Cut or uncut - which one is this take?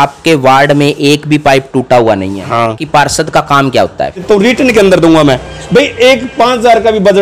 cut